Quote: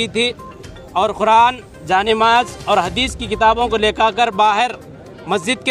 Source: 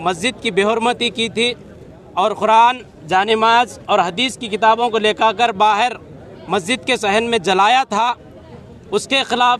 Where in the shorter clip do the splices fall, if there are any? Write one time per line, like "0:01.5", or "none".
none